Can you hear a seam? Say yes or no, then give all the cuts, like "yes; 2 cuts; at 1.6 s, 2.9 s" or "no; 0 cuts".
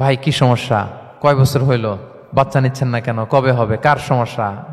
yes; 2 cuts; at 1.0 s, 2.1 s